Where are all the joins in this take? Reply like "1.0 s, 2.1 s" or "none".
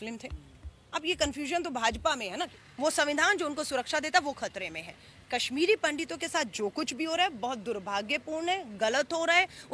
2.5 s